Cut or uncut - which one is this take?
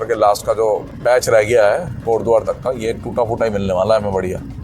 cut